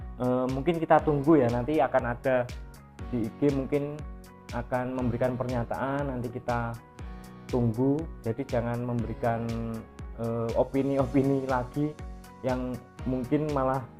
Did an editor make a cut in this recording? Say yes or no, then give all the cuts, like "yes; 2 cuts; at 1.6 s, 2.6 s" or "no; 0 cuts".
no; 0 cuts